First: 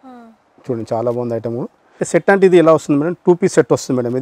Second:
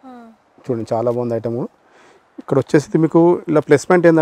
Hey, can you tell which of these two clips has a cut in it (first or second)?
first